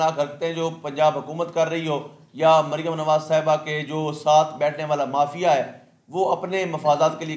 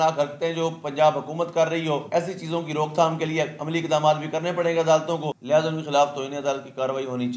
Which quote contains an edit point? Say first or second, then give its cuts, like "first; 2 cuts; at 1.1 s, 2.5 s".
second; 2 cuts; at 2.0 s, 5.3 s